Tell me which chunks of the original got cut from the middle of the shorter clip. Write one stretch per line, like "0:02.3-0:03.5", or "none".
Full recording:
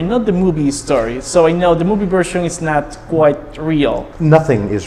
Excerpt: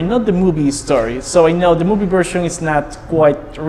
none